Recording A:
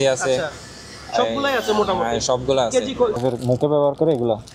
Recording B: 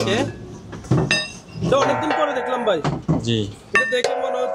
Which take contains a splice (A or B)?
A